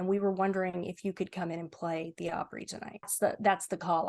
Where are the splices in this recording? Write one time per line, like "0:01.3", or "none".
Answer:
0:03.1